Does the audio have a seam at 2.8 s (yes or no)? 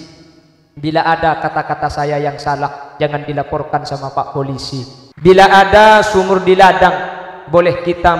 no